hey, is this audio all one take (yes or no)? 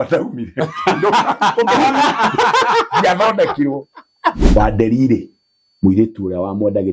no